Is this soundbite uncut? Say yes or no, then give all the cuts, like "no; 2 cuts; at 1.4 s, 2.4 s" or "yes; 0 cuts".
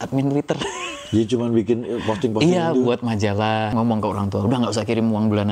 no; 1 cut; at 3.7 s